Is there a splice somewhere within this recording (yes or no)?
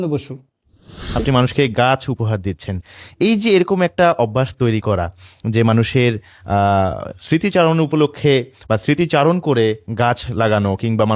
yes